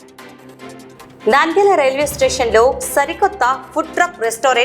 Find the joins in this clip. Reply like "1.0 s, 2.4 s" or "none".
0.9 s